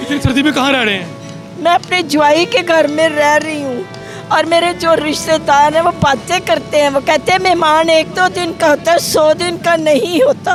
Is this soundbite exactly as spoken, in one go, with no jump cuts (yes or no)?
yes